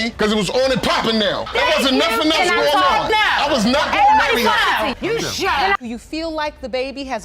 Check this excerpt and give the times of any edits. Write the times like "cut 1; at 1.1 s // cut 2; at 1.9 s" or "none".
cut 1; at 5.8 s